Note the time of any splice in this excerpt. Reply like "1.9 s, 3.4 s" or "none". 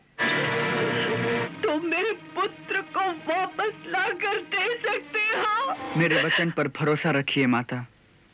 1.5 s, 5.8 s